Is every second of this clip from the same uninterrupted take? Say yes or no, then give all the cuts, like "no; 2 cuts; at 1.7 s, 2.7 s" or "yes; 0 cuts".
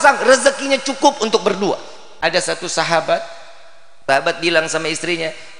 no; 1 cut; at 2.0 s